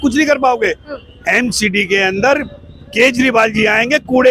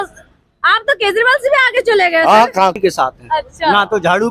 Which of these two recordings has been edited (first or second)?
second